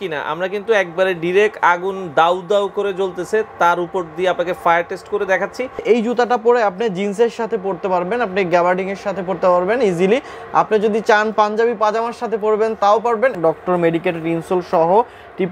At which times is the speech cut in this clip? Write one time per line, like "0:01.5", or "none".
0:05.8
0:13.4